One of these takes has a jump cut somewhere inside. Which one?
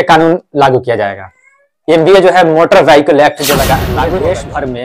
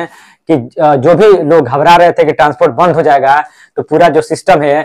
first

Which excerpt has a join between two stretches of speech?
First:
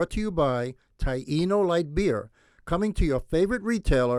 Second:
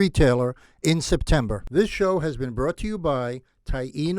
second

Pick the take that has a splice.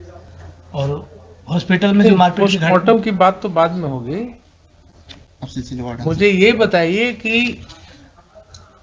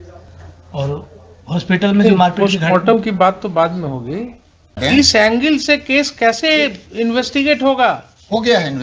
second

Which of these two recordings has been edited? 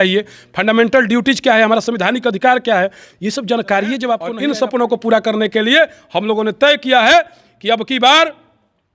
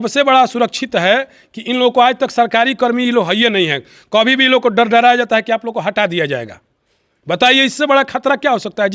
first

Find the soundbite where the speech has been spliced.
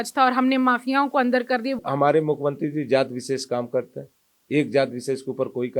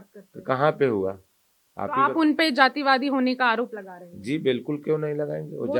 first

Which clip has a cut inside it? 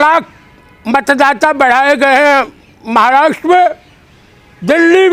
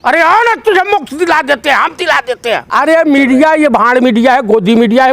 second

